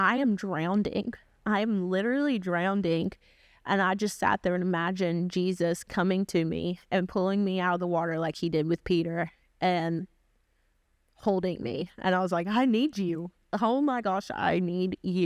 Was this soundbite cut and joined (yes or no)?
no